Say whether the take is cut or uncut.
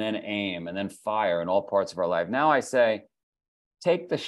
uncut